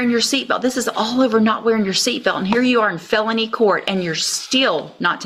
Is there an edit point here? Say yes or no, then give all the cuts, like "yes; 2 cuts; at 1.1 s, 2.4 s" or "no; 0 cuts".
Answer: no; 0 cuts